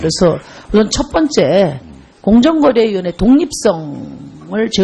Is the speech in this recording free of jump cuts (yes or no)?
no